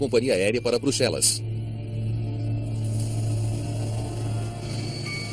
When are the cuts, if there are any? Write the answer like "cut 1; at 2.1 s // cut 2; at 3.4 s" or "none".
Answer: none